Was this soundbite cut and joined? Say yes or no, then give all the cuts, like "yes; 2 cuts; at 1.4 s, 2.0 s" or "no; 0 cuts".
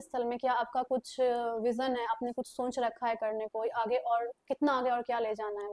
no; 0 cuts